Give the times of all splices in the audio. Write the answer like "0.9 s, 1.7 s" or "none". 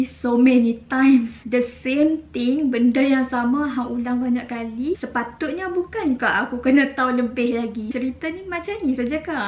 5.0 s, 7.9 s